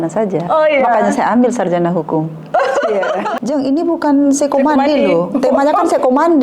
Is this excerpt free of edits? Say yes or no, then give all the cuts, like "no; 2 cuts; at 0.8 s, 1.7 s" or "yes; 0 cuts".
no; 1 cut; at 3.3 s